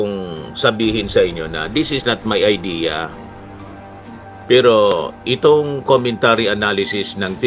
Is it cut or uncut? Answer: uncut